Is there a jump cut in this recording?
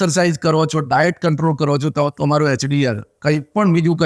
no; 0 cuts

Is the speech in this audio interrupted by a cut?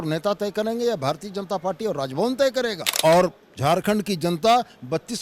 yes; 1 cut; at 2.8 s

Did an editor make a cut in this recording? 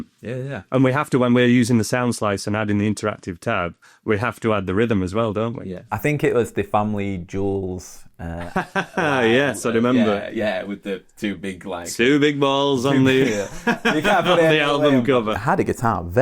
yes; 2 cuts; at 5.9 s, 15.4 s

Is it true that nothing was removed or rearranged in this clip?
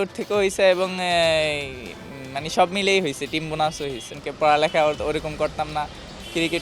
no; 1 cut; at 4.1 s

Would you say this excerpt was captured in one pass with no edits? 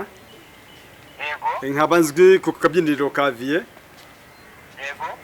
no; 1 cut; at 2.5 s

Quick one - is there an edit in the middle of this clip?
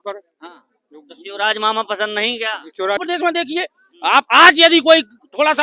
yes; 1 cut; at 3.0 s

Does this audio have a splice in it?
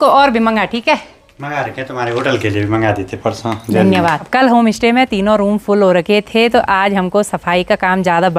no; 0 cuts

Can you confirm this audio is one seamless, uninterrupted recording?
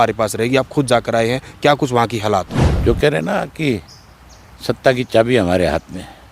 no; 1 cut; at 2.6 s

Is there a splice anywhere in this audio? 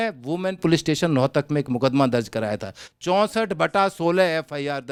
no; 0 cuts

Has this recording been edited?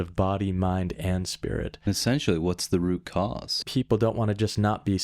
yes; 2 cuts; at 1.8 s, 3.6 s

